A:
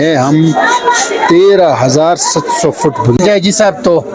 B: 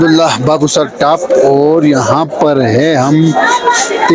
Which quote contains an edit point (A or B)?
A